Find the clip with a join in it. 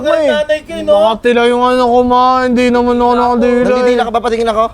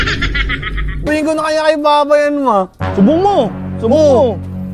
second; 1 cut; at 1.0 s

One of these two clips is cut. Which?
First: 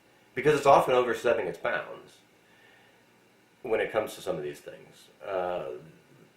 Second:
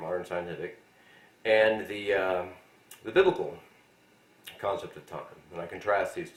first; 1 cut; at 4.5 s

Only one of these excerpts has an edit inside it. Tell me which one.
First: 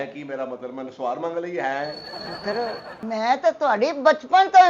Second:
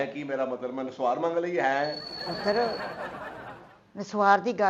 first; 1 cut; at 3.0 s

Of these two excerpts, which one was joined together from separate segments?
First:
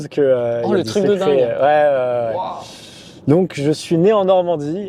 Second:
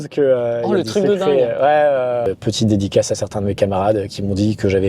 second; 1 cut; at 2.3 s

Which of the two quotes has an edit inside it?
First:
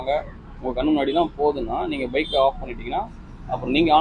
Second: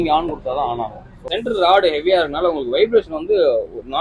second; 1 cut; at 1.2 s

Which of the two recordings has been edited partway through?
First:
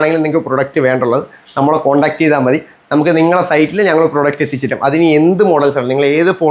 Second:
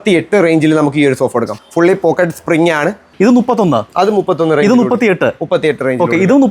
second; 2 cuts; at 1.5 s, 3.1 s

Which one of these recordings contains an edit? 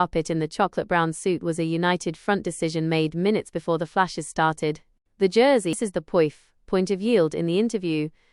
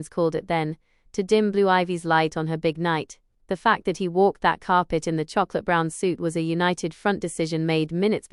first; 1 cut; at 5.8 s

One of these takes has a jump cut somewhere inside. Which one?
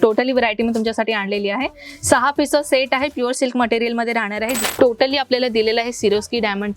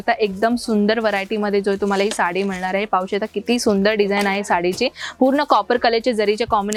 first; 1 cut; at 4.6 s

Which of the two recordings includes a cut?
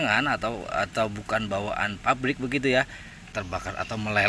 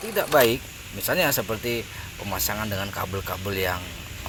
first; 1 cut; at 3.3 s

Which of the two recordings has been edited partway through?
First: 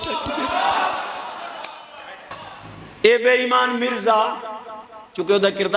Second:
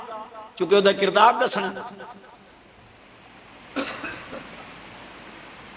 first; 1 cut; at 2.4 s

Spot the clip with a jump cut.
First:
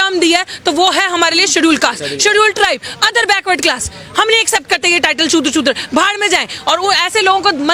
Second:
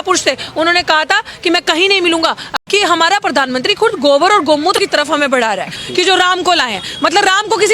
second; 3 cuts; at 2.5 s, 4.8 s, 5.8 s

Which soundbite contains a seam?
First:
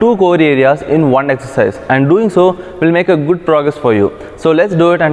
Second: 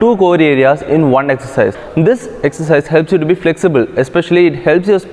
second; 1 cut; at 1.8 s

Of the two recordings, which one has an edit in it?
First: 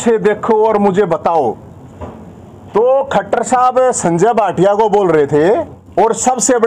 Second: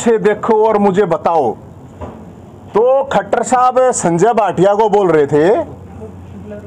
first; 1 cut; at 5.8 s

